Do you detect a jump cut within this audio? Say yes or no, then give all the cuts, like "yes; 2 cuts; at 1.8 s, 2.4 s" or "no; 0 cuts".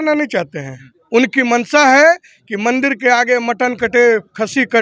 no; 0 cuts